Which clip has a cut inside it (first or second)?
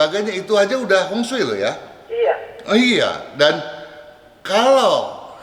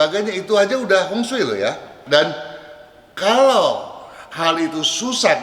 second